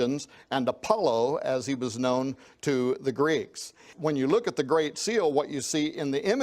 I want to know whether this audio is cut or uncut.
cut